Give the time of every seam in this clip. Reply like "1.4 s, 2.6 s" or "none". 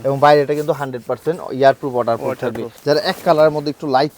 2.7 s